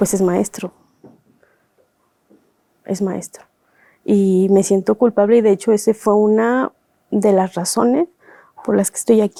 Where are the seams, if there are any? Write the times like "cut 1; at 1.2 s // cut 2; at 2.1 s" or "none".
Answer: none